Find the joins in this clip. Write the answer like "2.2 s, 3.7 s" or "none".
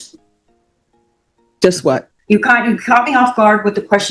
2.1 s